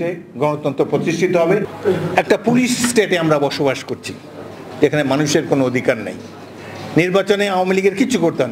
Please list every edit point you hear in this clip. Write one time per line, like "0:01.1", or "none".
0:01.7